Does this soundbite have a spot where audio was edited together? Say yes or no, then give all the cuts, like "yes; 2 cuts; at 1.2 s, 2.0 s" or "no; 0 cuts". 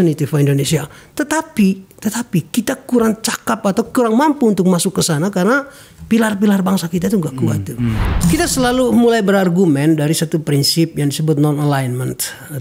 yes; 1 cut; at 8.0 s